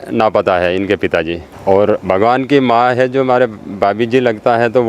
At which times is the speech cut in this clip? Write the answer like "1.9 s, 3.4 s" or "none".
1.4 s